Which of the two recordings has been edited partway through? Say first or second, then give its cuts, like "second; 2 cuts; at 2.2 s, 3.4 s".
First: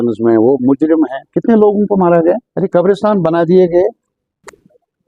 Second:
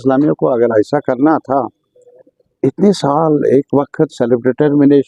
first; 1 cut; at 2.5 s